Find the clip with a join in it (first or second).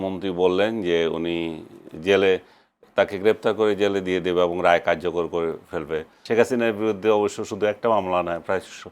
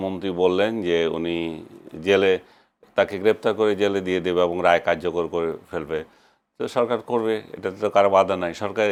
first